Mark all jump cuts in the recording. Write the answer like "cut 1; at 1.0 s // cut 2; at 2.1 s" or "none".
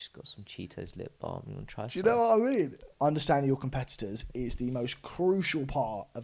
cut 1; at 2.8 s